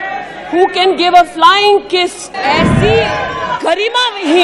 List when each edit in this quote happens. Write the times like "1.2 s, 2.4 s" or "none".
2.2 s